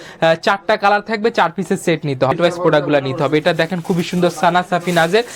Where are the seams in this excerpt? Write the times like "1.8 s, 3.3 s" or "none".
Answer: 2.3 s